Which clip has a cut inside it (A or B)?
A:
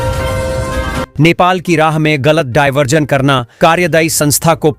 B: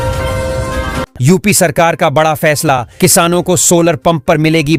A